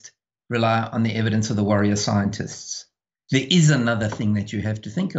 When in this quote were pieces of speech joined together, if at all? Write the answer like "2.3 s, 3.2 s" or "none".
none